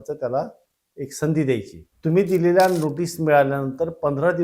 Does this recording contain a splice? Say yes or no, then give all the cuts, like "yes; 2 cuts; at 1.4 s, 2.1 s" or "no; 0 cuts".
yes; 1 cut; at 1.8 s